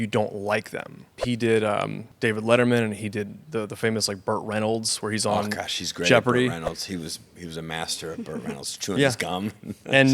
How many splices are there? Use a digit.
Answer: 2